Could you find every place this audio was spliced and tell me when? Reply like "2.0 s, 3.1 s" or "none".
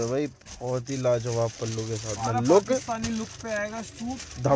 none